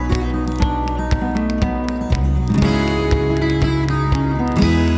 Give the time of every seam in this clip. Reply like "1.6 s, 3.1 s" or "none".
none